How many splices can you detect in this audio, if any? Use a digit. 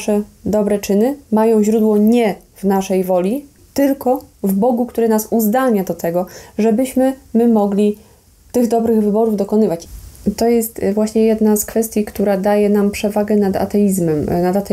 2